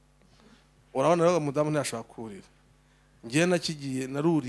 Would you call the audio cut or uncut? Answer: uncut